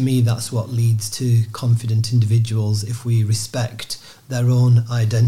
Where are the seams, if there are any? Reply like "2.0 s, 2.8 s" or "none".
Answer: none